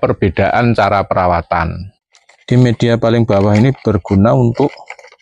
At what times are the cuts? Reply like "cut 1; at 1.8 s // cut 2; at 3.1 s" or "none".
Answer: cut 1; at 1.8 s